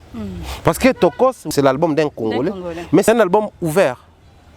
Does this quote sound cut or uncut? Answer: cut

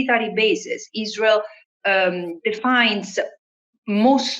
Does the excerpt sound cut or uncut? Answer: uncut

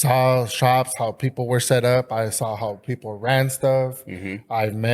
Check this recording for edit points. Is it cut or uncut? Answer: uncut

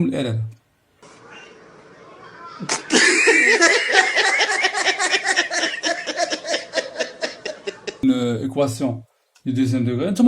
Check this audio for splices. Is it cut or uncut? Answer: cut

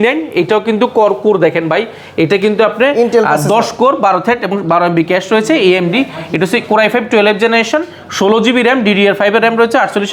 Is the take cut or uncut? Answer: uncut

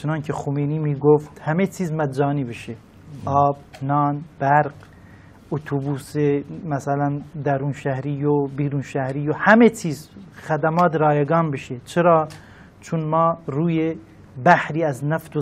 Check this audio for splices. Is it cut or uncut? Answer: uncut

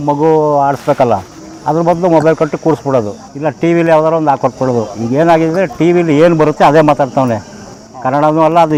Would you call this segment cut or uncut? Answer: uncut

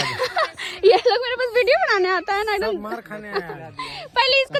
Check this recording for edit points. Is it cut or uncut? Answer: uncut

